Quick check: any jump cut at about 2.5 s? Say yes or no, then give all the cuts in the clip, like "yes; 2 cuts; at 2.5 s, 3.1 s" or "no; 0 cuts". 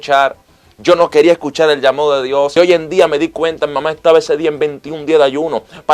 yes; 1 cut; at 2.5 s